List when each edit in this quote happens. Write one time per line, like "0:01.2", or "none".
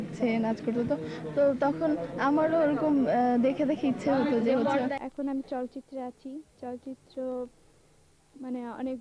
0:04.8